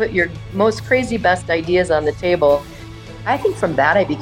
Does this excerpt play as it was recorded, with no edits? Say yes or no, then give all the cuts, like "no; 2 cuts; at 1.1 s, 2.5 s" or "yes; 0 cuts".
no; 1 cut; at 3.0 s